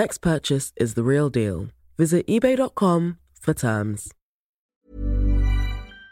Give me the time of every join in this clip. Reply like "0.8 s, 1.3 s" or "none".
4.6 s